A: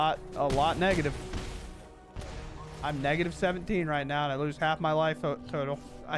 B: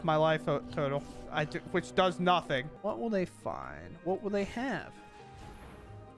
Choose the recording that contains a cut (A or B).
B